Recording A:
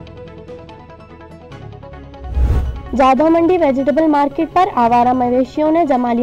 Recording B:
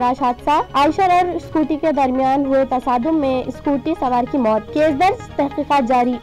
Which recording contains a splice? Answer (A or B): A